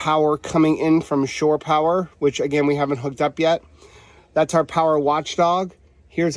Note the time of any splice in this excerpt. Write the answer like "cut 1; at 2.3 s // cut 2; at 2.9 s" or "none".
none